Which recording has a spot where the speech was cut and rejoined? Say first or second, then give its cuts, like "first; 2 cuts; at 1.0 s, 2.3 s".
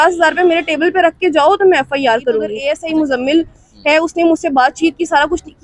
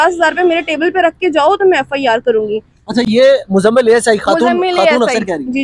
first; 1 cut; at 2.6 s